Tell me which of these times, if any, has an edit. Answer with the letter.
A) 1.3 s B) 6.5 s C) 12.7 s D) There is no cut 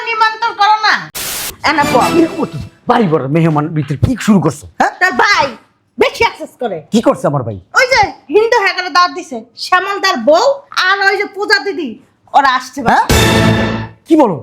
A